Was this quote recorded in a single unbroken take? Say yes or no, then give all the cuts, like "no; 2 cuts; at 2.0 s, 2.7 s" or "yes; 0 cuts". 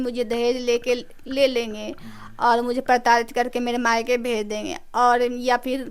yes; 0 cuts